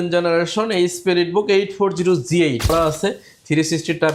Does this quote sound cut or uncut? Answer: cut